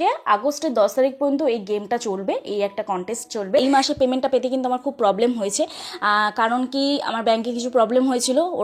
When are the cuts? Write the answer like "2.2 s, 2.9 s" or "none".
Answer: 3.6 s